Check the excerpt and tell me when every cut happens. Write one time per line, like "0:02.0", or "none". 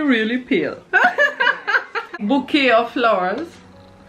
0:02.1